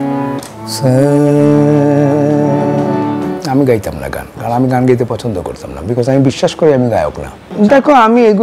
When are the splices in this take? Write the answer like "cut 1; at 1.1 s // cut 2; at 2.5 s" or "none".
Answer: cut 1; at 3.3 s // cut 2; at 7.4 s